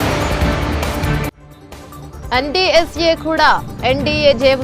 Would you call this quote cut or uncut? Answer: uncut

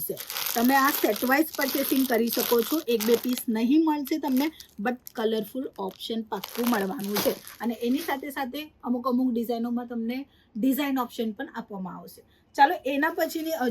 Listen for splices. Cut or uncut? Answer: uncut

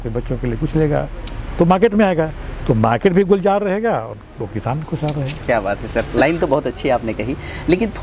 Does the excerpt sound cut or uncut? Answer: uncut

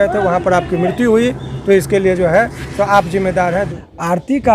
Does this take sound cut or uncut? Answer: cut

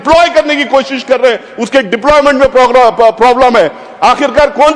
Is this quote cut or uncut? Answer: uncut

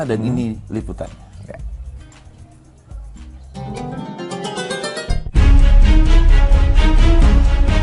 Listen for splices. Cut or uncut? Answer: uncut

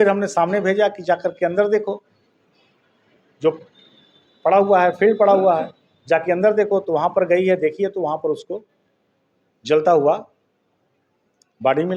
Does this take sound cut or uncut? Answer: uncut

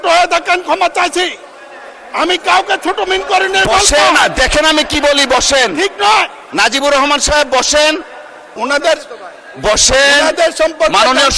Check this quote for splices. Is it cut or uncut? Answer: uncut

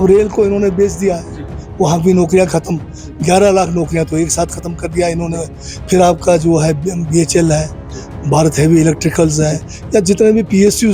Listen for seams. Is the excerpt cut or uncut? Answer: uncut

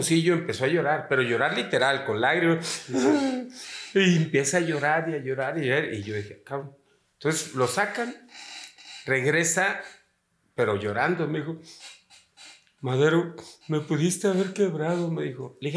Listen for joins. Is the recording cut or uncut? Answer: uncut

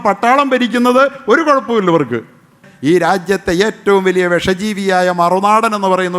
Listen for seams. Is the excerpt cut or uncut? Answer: cut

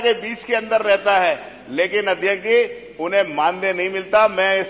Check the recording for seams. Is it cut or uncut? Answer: uncut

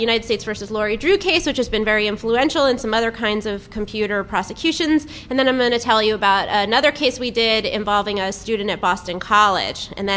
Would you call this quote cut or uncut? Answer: uncut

